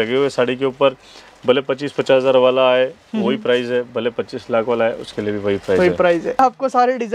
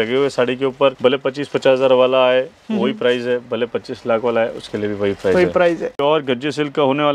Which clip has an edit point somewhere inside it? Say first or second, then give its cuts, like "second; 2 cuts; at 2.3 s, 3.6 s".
second; 2 cuts; at 1.0 s, 5.9 s